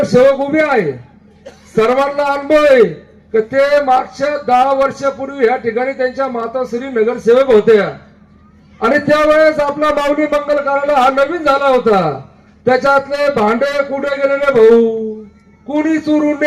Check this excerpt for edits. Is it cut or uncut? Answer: uncut